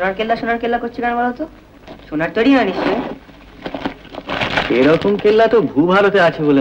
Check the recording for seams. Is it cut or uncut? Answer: uncut